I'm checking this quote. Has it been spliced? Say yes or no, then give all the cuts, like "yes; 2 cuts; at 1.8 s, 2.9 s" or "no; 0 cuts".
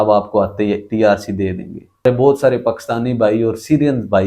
yes; 1 cut; at 2.0 s